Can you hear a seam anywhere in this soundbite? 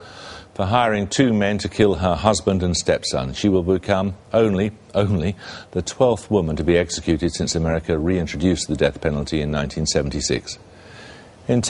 yes; 1 cut; at 5.1 s

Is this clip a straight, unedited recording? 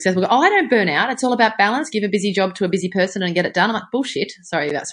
yes; 0 cuts

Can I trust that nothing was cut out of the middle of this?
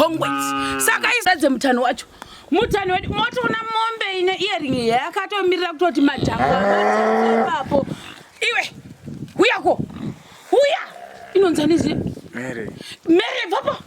no; 1 cut; at 1.2 s

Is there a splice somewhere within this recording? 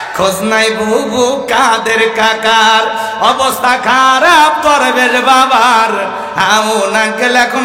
no; 0 cuts

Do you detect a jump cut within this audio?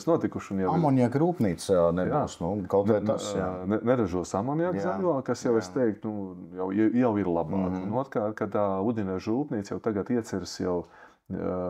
no; 0 cuts

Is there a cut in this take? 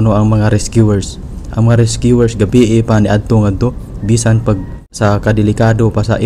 yes; 1 cut; at 4.8 s

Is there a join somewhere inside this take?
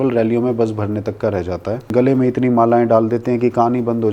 yes; 1 cut; at 1.9 s

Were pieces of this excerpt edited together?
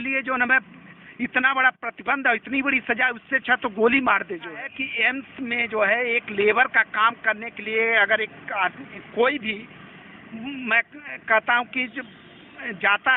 yes; 1 cut; at 4.6 s

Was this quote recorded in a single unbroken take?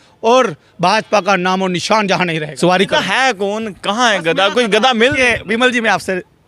no; 1 cut; at 2.4 s

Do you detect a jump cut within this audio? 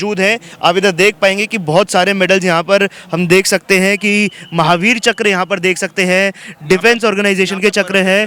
no; 0 cuts

